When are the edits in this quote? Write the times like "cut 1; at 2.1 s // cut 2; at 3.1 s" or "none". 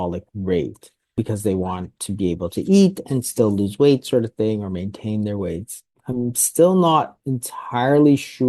cut 1; at 1.2 s